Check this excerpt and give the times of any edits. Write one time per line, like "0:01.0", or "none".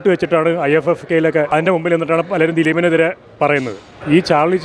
none